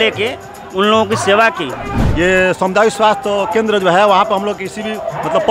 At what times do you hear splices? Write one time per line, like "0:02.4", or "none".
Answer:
0:01.9